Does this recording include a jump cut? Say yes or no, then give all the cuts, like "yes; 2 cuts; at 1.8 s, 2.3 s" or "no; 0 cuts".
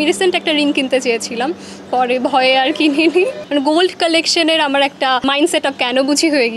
yes; 2 cuts; at 3.4 s, 5.2 s